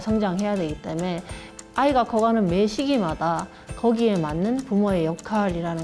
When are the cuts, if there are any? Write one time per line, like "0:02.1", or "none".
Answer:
none

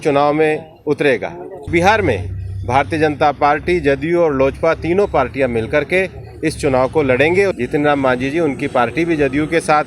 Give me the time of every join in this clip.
0:01.7
0:07.6

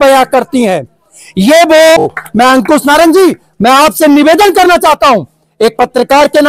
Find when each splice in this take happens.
0:02.2

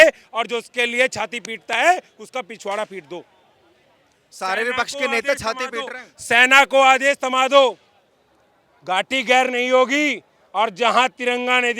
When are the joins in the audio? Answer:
none

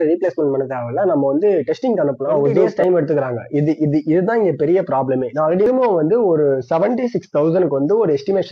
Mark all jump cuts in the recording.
0:02.7
0:05.7

